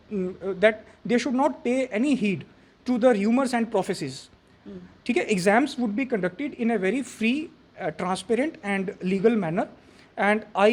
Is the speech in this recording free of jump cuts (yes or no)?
yes